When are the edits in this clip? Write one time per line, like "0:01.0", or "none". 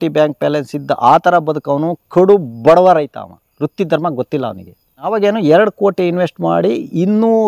0:05.0